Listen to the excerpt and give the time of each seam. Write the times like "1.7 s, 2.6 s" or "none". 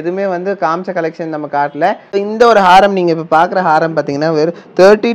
2.0 s